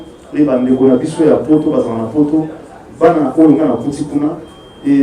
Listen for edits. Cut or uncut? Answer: uncut